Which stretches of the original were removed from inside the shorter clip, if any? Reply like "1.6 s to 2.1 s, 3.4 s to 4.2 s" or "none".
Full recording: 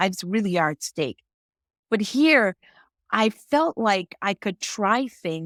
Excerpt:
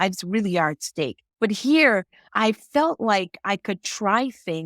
1.2 s to 1.7 s, 2.7 s to 3.0 s